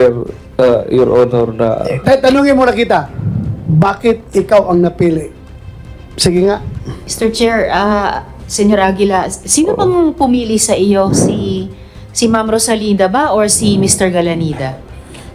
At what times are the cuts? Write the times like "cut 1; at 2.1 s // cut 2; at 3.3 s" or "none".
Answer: cut 1; at 6.8 s